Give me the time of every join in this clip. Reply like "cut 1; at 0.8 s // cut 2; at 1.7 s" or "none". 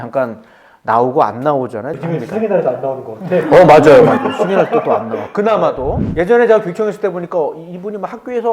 cut 1; at 1.9 s // cut 2; at 6.0 s